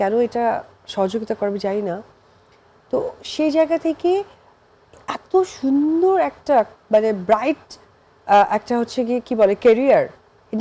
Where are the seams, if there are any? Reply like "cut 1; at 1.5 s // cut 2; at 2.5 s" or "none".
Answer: none